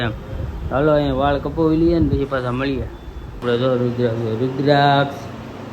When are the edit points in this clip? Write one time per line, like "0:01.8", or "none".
0:03.2